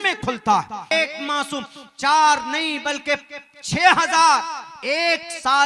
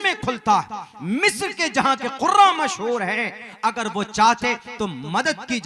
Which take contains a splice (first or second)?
first